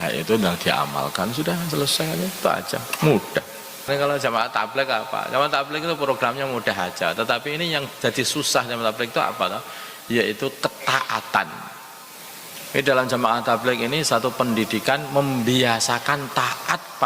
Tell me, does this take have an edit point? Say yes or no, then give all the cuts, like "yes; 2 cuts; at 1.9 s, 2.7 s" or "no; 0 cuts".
yes; 1 cut; at 3.9 s